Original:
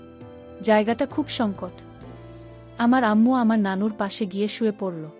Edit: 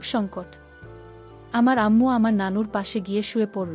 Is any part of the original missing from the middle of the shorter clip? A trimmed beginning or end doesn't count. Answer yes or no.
no